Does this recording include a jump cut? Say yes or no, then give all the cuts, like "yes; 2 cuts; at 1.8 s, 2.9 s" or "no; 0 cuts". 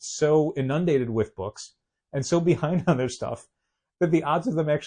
no; 0 cuts